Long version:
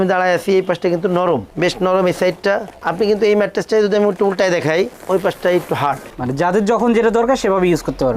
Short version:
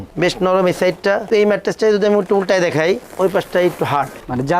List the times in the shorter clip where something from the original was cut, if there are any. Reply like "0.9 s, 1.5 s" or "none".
1.3 s